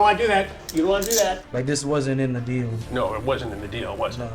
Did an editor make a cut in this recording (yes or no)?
yes